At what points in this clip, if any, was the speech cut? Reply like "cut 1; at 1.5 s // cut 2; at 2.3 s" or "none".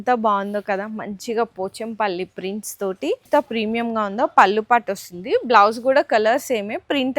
cut 1; at 3.2 s